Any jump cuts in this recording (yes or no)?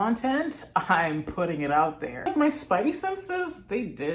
yes